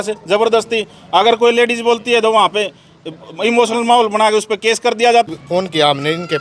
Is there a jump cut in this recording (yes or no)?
yes